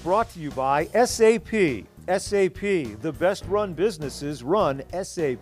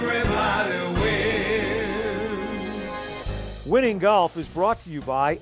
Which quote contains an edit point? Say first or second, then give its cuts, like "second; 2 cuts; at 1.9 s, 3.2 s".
second; 1 cut; at 3.2 s